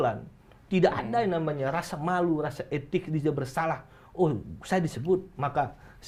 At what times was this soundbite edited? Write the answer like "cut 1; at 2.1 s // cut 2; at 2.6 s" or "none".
none